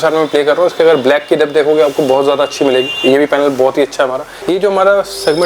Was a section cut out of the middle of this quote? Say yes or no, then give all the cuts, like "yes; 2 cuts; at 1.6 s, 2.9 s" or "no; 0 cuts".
yes; 1 cut; at 4.3 s